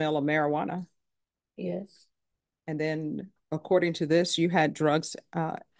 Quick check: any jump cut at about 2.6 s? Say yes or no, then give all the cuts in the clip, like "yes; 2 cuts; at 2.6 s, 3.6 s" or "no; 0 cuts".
no; 0 cuts